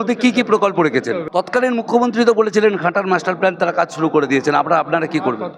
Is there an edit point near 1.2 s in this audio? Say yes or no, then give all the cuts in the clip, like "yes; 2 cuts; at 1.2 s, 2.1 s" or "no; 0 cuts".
yes; 1 cut; at 1.2 s